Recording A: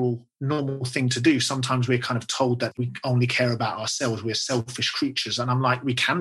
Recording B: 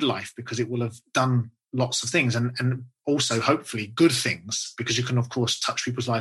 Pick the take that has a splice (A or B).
A